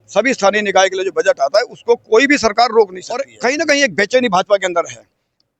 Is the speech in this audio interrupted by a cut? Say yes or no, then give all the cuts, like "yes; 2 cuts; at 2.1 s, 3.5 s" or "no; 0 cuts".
yes; 1 cut; at 3.3 s